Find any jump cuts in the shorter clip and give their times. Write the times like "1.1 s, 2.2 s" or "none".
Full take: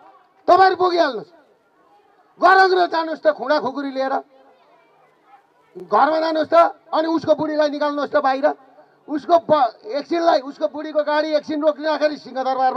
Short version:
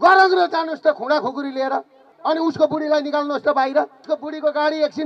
2.1 s, 4.0 s